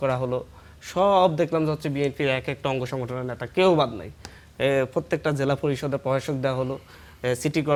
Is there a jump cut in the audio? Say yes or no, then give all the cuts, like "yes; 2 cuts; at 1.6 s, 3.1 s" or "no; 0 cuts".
no; 0 cuts